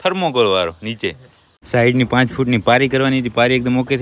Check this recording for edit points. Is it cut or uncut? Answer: cut